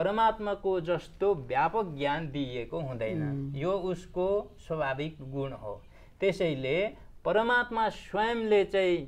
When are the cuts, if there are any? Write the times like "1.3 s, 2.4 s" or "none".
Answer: none